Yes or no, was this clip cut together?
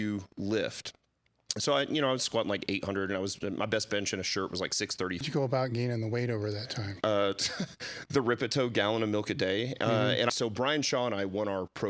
yes